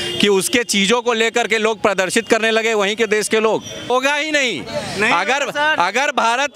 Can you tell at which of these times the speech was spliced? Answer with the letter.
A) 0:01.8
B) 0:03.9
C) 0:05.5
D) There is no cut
B